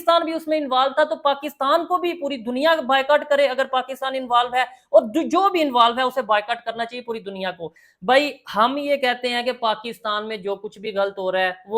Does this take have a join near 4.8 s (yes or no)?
no